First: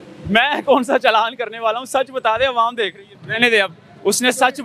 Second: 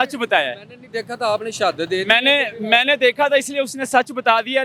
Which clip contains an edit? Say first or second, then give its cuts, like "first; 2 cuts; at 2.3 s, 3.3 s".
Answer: first; 1 cut; at 3.1 s